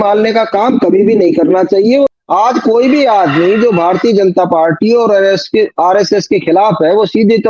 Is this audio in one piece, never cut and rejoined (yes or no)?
no